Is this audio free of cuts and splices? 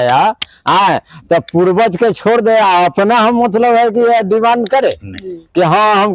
yes; 0 cuts

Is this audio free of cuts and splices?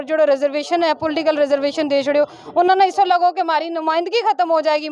yes; 0 cuts

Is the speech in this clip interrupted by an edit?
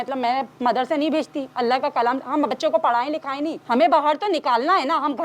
yes; 2 cuts; at 1.4 s, 3.6 s

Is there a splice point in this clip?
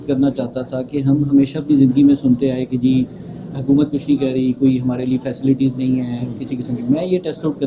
no; 0 cuts

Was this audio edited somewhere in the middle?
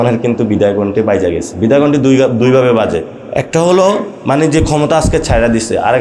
yes; 2 cuts; at 3.2 s, 4.1 s

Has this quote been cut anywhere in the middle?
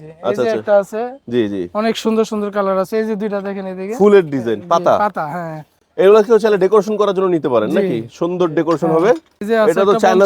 yes; 1 cut; at 9.3 s

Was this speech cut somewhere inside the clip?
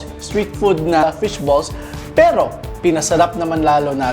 yes; 2 cuts; at 1.0 s, 2.6 s

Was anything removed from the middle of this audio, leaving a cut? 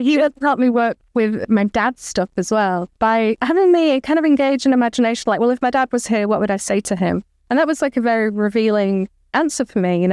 yes; 2 cuts; at 1.4 s, 3.1 s

